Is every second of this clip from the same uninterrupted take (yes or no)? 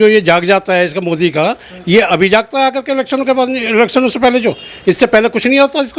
yes